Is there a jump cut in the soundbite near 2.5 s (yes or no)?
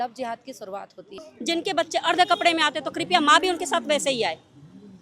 no